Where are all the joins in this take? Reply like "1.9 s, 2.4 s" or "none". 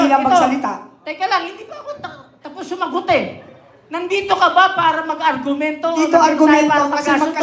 none